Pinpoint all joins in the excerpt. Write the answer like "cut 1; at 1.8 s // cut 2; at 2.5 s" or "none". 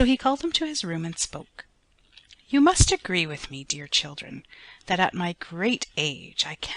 cut 1; at 1.3 s